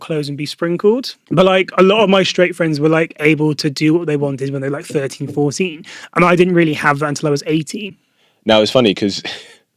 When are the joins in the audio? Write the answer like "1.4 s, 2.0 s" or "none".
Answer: 1.2 s, 7.9 s